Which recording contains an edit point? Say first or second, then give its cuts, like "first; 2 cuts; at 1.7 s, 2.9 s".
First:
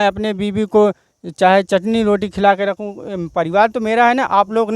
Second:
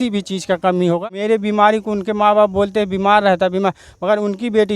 second; 1 cut; at 1.0 s